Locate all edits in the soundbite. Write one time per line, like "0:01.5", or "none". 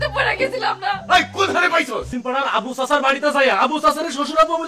0:02.1